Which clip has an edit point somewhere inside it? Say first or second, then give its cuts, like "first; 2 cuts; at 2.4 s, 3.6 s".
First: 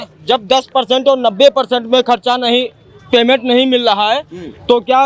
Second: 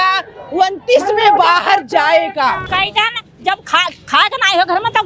second; 1 cut; at 2.6 s